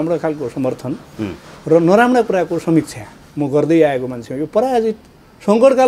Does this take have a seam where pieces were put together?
no; 0 cuts

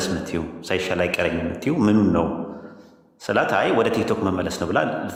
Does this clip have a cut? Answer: no; 0 cuts

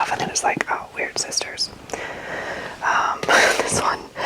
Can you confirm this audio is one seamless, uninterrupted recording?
yes; 0 cuts

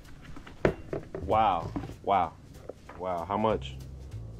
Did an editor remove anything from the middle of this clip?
yes; 1 cut; at 2.9 s

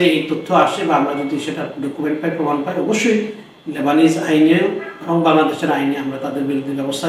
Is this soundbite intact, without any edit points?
yes; 0 cuts

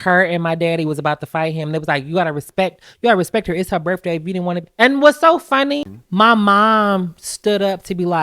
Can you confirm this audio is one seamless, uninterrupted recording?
no; 1 cut; at 6.0 s

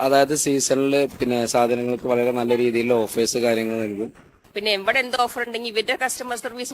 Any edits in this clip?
yes; 1 cut; at 4.3 s

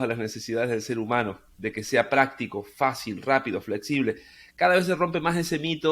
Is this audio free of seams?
yes; 0 cuts

